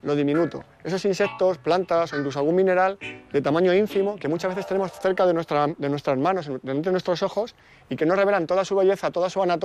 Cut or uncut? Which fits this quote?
cut